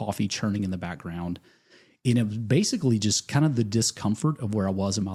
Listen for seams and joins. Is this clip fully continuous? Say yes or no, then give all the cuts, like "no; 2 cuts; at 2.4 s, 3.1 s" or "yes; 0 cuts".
yes; 0 cuts